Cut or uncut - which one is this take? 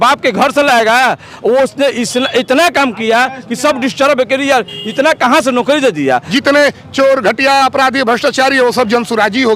cut